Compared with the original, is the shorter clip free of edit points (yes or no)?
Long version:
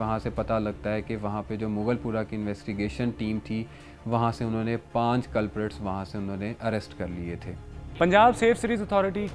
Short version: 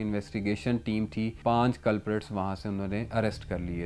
no